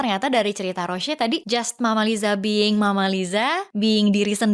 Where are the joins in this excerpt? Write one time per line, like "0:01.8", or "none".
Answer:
0:01.4
0:03.6